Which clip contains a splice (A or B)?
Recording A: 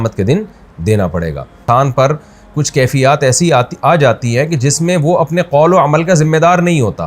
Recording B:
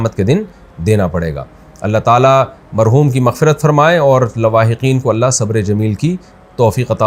A